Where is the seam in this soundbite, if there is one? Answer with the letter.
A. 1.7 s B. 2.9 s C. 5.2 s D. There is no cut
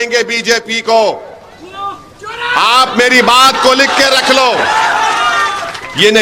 D